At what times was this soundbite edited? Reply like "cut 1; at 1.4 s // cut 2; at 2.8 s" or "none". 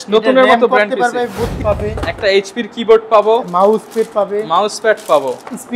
cut 1; at 1.6 s